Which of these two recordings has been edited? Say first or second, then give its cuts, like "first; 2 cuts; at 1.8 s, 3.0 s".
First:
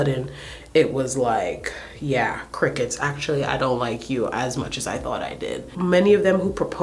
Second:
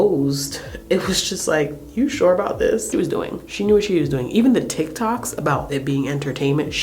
second; 1 cut; at 2.9 s